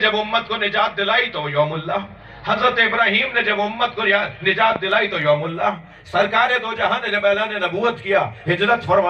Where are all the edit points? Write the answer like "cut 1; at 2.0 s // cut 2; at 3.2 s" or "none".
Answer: none